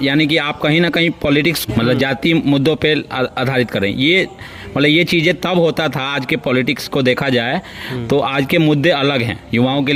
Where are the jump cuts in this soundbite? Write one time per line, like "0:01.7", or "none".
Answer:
none